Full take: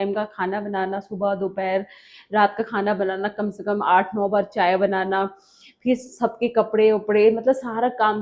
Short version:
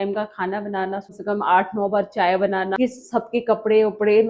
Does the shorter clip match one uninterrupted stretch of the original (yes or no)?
no